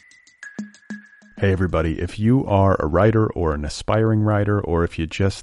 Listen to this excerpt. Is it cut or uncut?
cut